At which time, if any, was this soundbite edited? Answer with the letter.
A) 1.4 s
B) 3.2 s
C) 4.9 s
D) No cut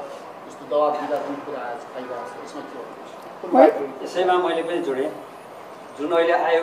D